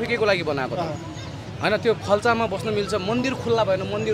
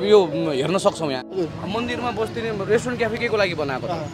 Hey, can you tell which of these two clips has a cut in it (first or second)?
second